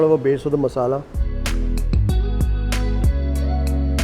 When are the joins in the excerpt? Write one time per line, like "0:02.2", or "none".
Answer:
0:01.2